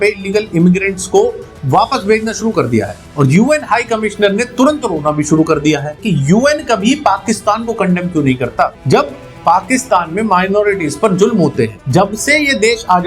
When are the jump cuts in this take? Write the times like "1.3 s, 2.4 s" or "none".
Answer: 5.9 s, 8.8 s, 11.8 s